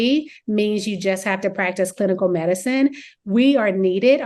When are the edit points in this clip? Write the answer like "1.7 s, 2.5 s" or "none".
none

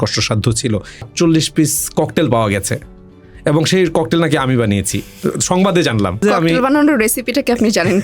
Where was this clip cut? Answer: 1.1 s, 6.2 s

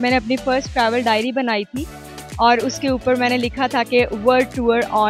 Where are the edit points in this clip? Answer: none

